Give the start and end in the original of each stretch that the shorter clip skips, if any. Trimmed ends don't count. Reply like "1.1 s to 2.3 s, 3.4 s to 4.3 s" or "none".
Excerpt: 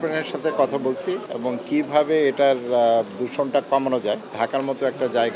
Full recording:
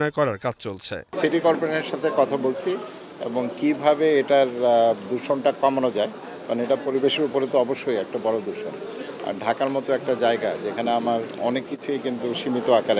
2.9 s to 3.2 s, 6.2 s to 9.4 s